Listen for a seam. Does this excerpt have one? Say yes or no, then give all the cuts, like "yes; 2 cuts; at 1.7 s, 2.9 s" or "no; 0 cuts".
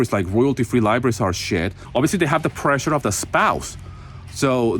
yes; 1 cut; at 1.8 s